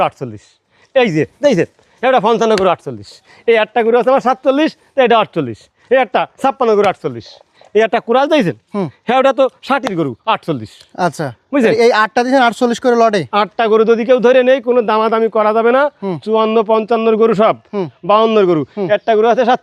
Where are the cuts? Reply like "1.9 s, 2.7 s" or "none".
none